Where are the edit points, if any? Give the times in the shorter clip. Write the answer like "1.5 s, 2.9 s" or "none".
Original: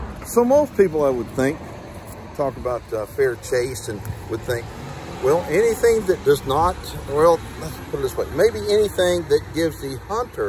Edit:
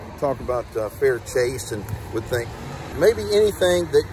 2.9 s